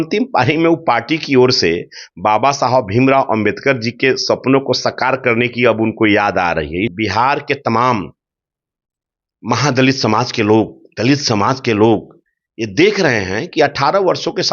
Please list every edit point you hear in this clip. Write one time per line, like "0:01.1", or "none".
0:06.9